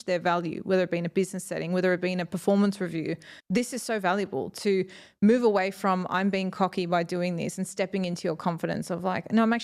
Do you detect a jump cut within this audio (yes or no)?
no